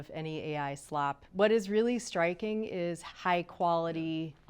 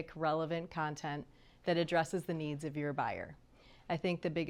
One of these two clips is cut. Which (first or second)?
first